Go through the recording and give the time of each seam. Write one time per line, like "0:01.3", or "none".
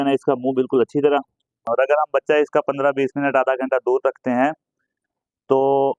0:01.6